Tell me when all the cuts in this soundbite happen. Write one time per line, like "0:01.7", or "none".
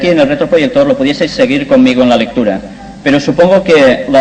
none